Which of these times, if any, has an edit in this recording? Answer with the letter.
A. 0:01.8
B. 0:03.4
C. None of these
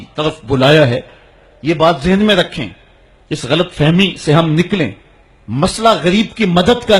A